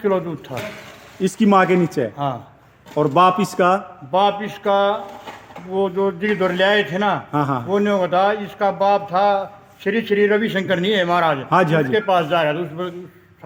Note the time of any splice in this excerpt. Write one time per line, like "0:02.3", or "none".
none